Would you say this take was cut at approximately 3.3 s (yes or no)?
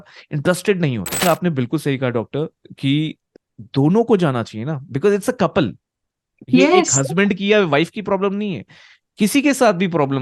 yes